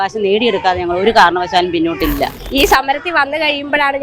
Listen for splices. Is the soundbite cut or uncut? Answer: cut